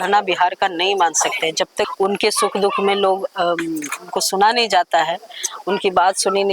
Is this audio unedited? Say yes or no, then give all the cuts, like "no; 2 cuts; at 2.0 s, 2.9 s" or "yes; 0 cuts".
no; 1 cut; at 1.9 s